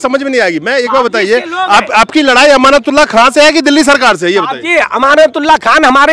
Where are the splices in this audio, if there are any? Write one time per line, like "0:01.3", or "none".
none